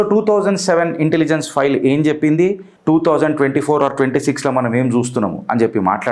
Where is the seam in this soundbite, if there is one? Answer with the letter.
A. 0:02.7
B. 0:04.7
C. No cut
A